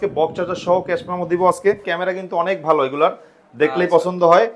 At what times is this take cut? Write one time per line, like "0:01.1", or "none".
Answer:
0:01.9